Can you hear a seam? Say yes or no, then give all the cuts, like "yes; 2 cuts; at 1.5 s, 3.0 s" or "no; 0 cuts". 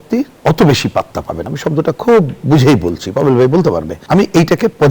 no; 0 cuts